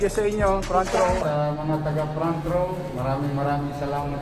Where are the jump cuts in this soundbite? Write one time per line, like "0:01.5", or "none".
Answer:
0:01.2